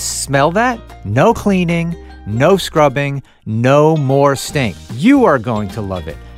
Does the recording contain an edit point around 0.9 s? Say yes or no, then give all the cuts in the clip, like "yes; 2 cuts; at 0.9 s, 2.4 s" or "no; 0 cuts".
yes; 2 cuts; at 0.9 s, 4.8 s